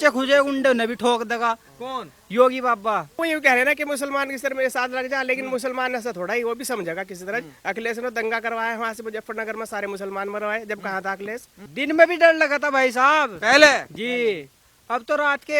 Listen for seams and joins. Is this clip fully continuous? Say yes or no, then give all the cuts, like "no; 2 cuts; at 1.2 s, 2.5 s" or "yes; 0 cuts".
no; 2 cuts; at 3.2 s, 11.6 s